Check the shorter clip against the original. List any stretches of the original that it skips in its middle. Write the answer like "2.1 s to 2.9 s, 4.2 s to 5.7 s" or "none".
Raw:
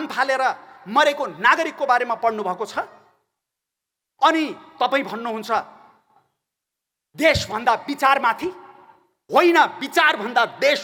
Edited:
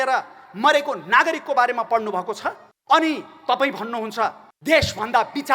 3.0 s to 4.0 s, 5.8 s to 7.0 s